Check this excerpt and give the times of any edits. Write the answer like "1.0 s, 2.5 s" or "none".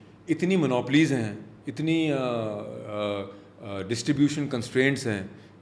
none